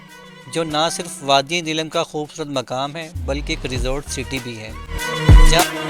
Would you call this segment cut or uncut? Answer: cut